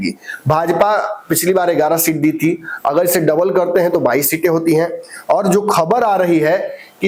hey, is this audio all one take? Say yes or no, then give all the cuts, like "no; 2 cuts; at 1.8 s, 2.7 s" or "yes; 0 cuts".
yes; 0 cuts